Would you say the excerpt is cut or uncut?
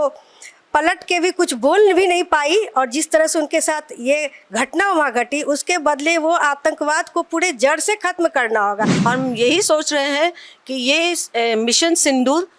cut